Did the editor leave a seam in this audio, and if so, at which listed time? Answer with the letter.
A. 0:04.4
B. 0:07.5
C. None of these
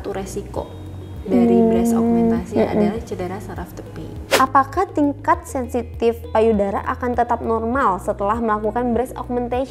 A